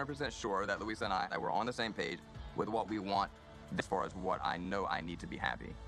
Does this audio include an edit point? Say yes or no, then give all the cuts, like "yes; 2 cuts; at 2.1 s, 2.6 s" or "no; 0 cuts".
no; 0 cuts